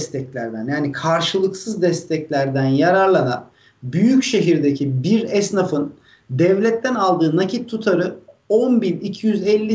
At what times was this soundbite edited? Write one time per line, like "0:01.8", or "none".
none

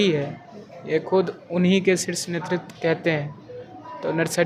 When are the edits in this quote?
none

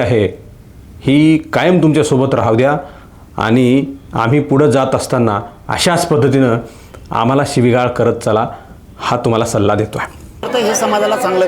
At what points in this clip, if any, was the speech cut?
none

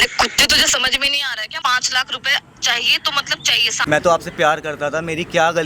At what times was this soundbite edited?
0:01.5
0:03.7

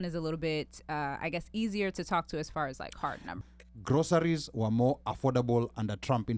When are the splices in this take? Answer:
0:03.3

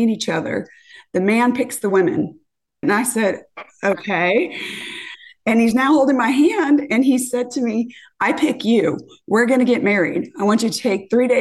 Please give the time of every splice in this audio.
0:02.8

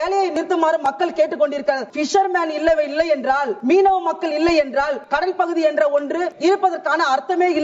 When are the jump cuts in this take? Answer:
0:01.9
0:03.5
0:05.0
0:06.3

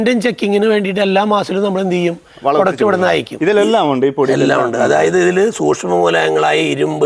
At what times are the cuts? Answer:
0:03.3

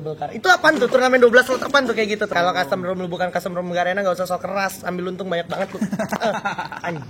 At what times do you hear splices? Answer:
0:02.3

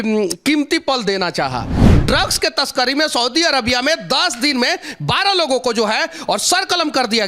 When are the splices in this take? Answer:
0:01.8

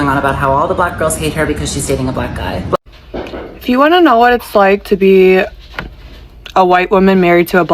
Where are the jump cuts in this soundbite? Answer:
0:02.8

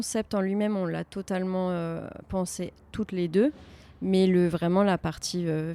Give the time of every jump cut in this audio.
none

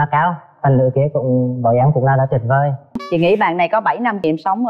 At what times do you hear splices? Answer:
0:03.0

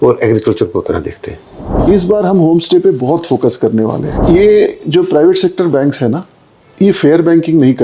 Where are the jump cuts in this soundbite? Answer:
0:01.7
0:04.1

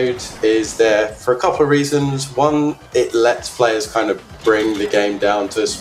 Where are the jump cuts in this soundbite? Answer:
none

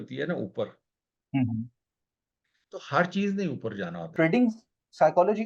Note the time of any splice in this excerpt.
0:04.1

